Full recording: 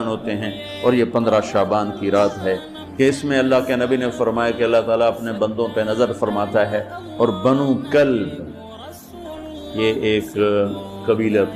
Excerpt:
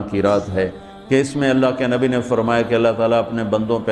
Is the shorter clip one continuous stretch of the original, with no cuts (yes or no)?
yes